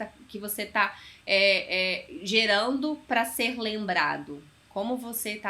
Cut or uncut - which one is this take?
uncut